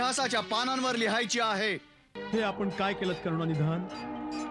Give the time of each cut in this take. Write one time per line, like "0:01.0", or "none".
0:02.0